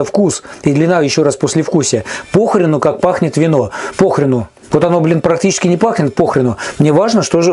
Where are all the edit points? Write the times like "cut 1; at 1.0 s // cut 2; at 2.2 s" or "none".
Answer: none